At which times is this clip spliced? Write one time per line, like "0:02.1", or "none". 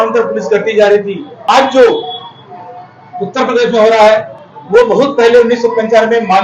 0:01.3